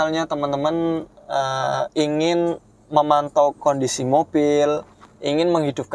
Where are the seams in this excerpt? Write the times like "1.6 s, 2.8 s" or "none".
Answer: none